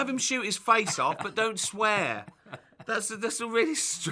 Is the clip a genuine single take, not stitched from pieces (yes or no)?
yes